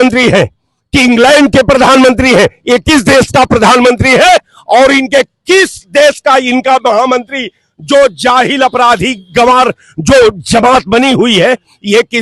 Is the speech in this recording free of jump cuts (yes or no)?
yes